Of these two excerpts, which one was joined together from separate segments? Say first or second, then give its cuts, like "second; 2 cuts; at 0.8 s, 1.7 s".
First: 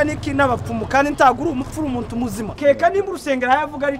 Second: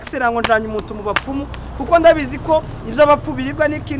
first; 1 cut; at 2.5 s